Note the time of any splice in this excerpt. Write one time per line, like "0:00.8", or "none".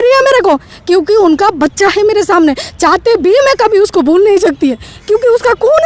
none